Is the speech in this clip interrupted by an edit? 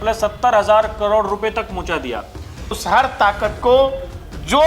yes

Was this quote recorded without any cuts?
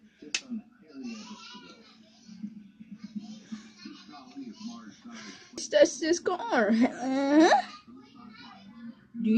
no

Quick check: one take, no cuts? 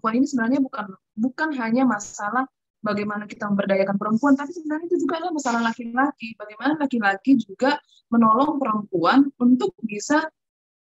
yes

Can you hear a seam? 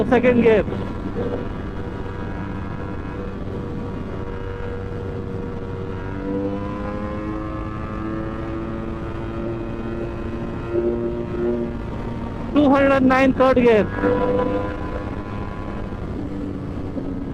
no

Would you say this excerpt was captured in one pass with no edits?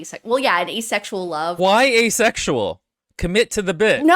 no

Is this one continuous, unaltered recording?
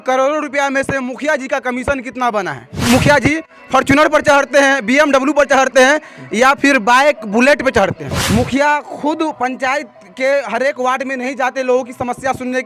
no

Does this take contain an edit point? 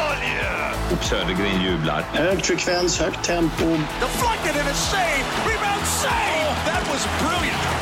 no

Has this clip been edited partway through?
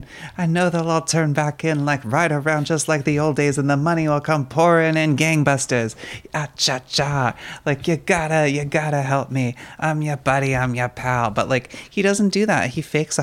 no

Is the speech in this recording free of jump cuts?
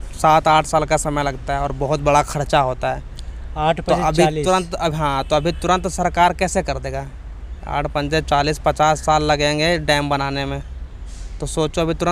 yes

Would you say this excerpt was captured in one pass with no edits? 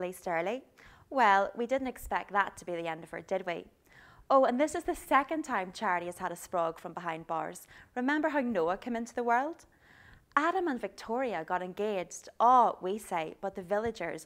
no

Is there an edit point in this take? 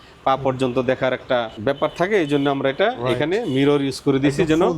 yes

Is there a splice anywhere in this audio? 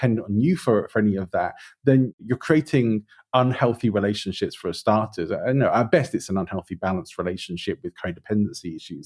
yes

